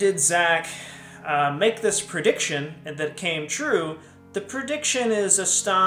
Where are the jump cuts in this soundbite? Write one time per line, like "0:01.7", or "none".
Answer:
none